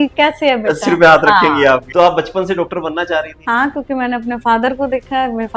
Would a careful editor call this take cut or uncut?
cut